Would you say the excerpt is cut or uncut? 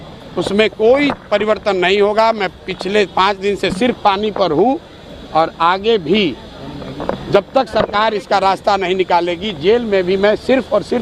uncut